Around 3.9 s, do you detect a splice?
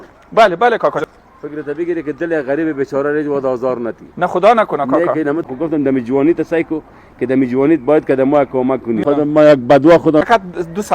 no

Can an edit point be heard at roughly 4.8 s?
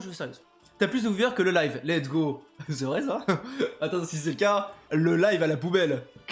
yes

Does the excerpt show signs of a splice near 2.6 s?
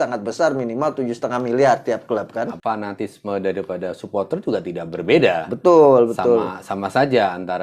yes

